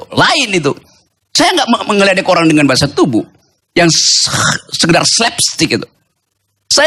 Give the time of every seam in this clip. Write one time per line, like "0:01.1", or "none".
none

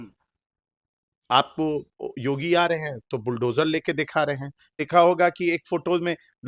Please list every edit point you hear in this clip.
0:04.8

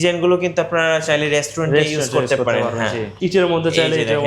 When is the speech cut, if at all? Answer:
0:03.1

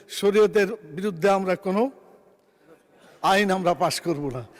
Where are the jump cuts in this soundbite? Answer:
none

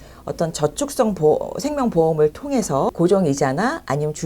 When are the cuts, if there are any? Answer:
0:02.9

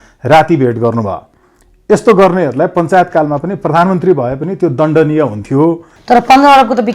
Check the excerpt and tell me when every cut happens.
0:05.9

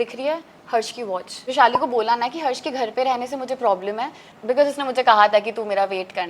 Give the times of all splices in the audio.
0:01.4
0:04.3

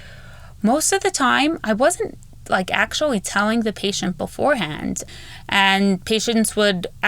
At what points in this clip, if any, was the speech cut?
0:05.0

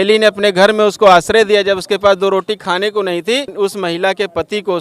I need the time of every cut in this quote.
0:03.5

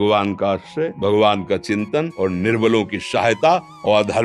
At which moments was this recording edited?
0:00.9
0:02.1

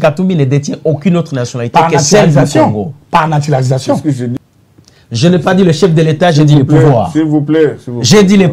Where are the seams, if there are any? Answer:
0:04.3

